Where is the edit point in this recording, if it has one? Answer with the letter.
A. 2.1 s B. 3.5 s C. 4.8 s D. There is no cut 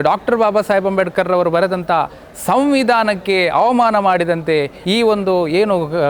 C